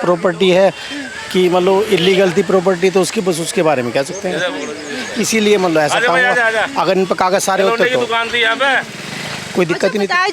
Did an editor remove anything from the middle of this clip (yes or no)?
no